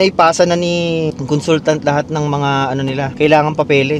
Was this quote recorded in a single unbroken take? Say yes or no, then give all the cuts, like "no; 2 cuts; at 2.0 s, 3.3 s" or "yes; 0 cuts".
no; 1 cut; at 3.1 s